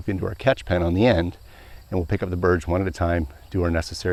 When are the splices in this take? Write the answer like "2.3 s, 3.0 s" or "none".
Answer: none